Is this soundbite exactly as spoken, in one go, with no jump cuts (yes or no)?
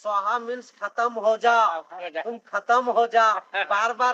yes